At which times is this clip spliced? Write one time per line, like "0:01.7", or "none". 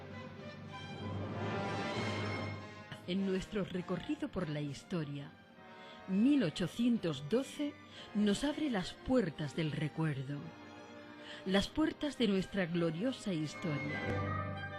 0:09.7